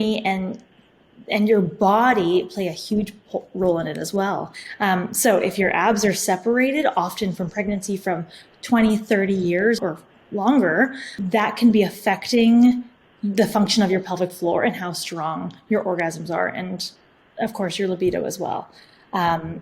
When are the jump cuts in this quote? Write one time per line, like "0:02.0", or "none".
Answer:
0:04.6
0:09.8
0:11.1